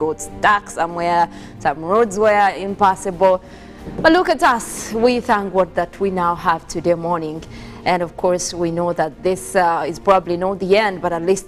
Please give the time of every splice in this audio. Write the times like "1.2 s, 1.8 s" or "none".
none